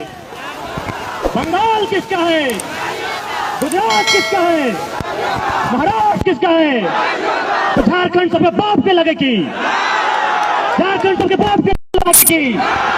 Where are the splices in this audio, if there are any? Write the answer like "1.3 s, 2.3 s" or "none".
none